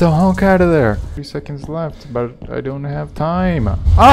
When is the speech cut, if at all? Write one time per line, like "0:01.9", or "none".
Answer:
0:01.2